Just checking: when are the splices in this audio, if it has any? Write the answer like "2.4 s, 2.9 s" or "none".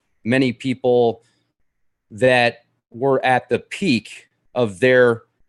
none